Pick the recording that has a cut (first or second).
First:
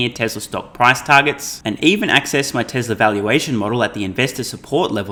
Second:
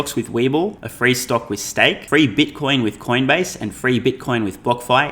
second